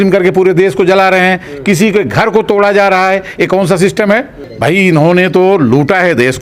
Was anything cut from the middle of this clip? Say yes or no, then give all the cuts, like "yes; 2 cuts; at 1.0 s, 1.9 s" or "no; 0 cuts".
yes; 1 cut; at 4.4 s